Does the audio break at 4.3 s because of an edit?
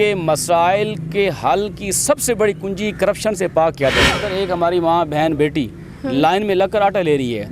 yes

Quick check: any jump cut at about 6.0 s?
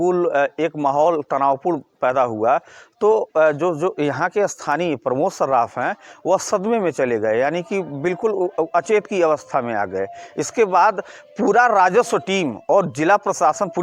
no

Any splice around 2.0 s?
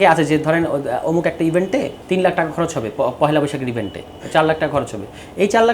yes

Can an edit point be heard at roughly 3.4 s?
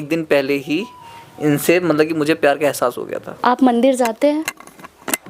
yes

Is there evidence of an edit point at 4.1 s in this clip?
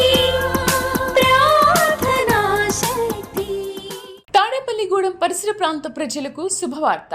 yes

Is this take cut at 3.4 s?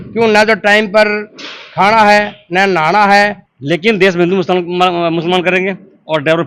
yes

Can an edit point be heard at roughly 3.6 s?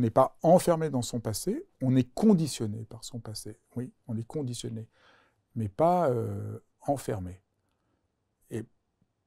no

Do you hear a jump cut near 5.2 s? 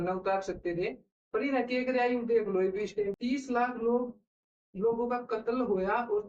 no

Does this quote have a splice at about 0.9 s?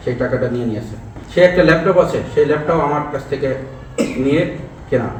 no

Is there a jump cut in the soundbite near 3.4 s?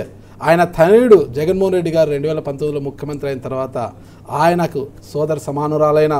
no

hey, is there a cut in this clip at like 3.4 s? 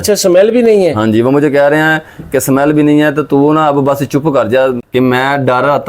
no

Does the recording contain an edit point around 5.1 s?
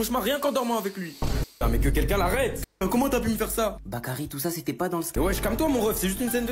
yes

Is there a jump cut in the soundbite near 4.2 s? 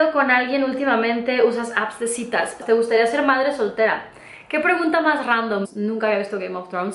no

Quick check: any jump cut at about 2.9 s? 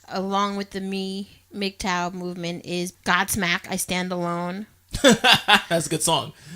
yes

